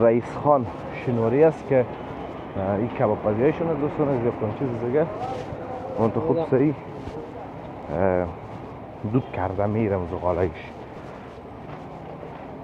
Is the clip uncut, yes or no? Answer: yes